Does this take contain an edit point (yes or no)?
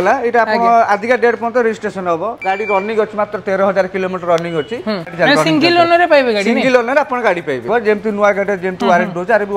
yes